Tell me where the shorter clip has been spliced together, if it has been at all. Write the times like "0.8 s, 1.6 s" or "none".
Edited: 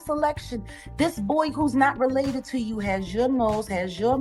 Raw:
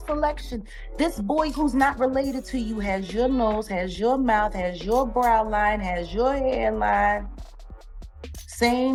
none